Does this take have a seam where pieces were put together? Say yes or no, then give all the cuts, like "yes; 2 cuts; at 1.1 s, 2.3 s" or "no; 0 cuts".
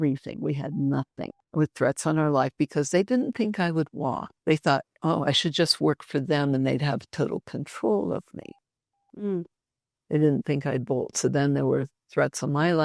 yes; 2 cuts; at 1.4 s, 4.3 s